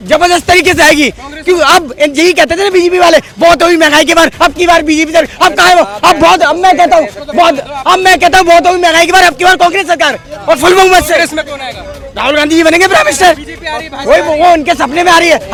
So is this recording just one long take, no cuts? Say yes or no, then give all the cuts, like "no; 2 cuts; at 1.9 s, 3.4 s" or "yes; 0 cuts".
yes; 0 cuts